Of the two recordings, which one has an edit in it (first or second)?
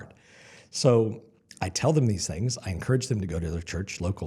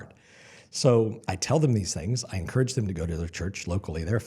second